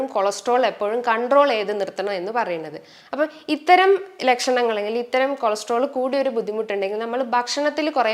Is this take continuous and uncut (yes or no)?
yes